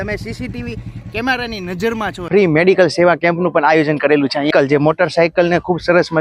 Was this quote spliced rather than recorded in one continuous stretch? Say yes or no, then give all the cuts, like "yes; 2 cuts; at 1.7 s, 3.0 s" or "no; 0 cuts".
yes; 2 cuts; at 2.2 s, 4.5 s